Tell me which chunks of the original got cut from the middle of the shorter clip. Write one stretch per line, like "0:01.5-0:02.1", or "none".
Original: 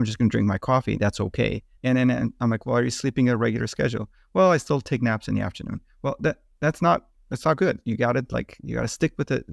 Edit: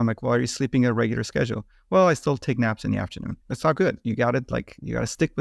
0:05.8-0:07.2

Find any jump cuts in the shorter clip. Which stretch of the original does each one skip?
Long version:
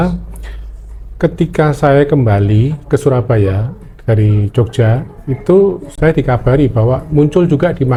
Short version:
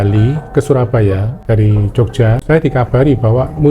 0:03.7-0:03.9
0:05.0-0:05.9

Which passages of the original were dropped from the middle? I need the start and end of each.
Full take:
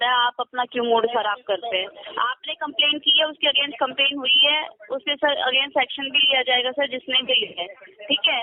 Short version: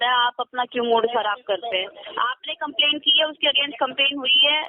none

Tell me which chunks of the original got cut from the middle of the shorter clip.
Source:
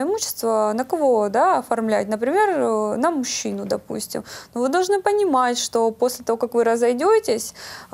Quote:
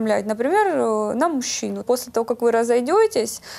0:03.6-0:06.0

